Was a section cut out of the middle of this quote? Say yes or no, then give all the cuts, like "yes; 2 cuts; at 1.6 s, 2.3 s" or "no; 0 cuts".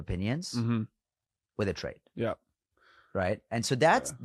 no; 0 cuts